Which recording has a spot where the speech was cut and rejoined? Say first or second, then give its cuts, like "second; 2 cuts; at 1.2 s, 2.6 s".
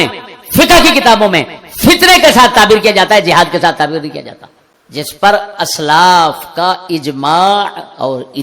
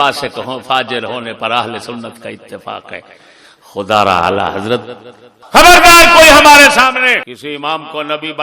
second; 1 cut; at 7.3 s